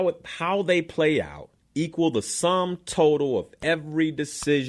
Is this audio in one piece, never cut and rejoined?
yes; 0 cuts

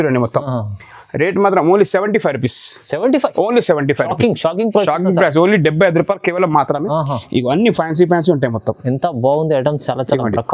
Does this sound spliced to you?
no; 0 cuts

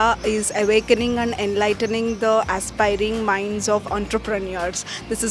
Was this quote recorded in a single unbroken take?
yes; 0 cuts

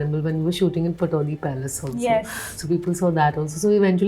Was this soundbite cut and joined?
no; 0 cuts

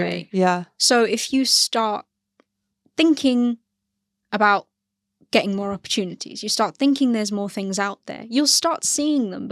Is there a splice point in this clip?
no; 0 cuts

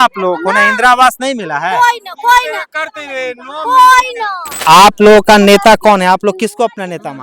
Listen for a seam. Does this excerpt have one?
yes; 1 cut; at 4.5 s

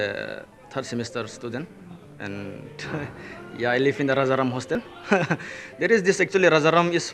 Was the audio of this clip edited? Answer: no; 0 cuts

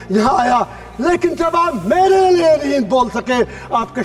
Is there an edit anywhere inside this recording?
no; 0 cuts

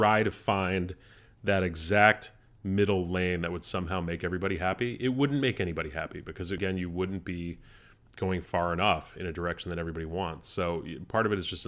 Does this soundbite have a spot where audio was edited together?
yes; 1 cut; at 6.6 s

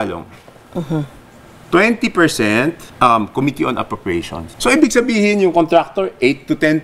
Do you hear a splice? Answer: yes; 2 cuts; at 2.9 s, 4.4 s

